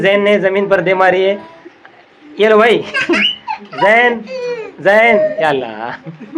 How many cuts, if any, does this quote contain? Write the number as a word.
zero